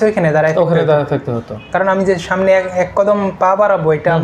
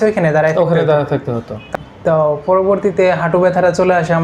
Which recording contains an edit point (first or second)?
second